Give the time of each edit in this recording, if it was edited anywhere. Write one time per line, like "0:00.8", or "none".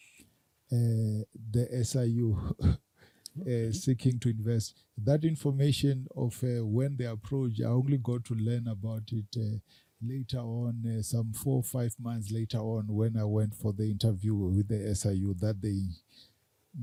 none